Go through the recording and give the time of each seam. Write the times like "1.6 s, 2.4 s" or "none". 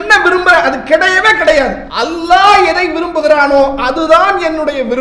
1.8 s